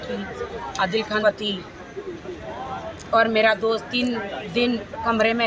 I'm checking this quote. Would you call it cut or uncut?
cut